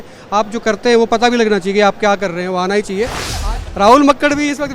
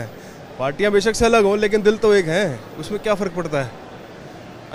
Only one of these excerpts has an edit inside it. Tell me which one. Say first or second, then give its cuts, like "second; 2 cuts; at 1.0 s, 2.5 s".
first; 1 cut; at 3.4 s